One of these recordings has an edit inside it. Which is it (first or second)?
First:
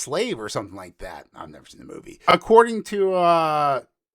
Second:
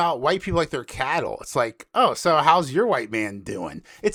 first